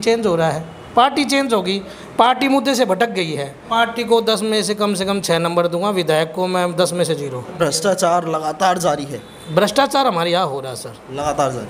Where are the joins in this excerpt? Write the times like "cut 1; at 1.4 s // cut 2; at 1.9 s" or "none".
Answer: cut 1; at 3.6 s // cut 2; at 7.6 s